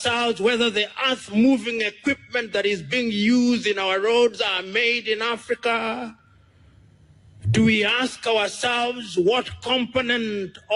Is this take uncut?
yes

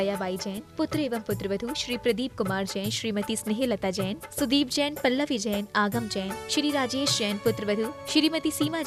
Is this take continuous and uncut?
yes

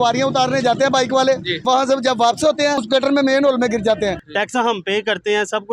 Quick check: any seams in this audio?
yes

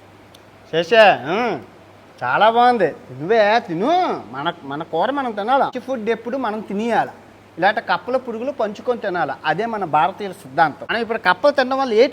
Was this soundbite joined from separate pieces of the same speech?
yes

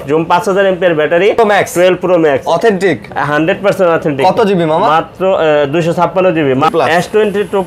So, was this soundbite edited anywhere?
yes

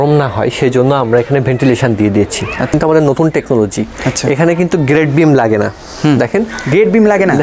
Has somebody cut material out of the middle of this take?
yes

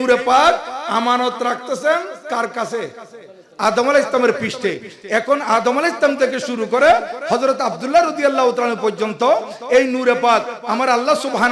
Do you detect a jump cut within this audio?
no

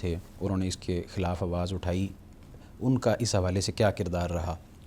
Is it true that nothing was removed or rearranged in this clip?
yes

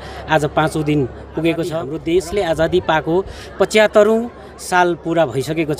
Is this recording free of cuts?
no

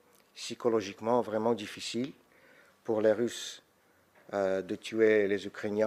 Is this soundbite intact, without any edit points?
yes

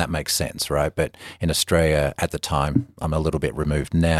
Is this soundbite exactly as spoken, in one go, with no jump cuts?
yes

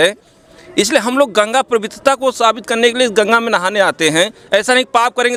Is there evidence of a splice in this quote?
no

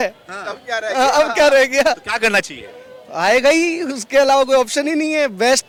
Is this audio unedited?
yes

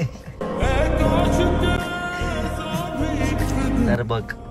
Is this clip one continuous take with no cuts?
yes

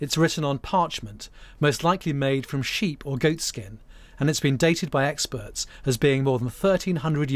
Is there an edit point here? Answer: no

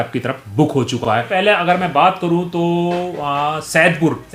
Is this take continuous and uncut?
no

